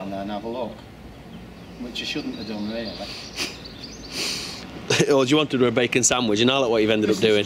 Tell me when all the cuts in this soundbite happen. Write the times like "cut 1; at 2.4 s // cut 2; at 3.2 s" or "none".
none

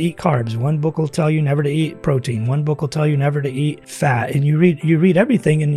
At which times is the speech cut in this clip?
cut 1; at 3.9 s

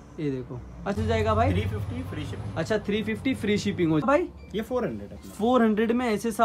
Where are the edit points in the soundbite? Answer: cut 1; at 1.0 s // cut 2; at 4.0 s

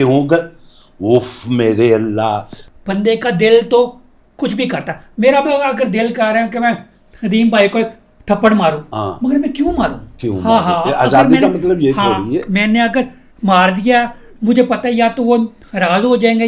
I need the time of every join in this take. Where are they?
cut 1; at 2.6 s

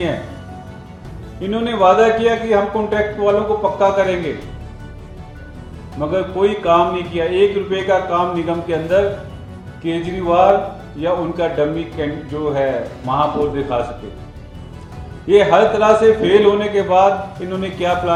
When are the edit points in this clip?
none

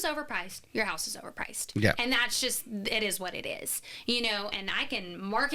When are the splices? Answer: cut 1; at 4.5 s

